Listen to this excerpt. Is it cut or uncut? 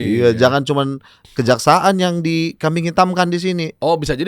uncut